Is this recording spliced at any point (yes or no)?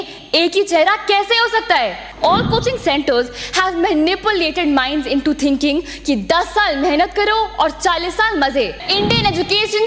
yes